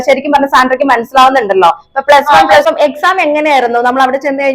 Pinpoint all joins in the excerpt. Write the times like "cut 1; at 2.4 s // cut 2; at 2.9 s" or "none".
cut 1; at 2.6 s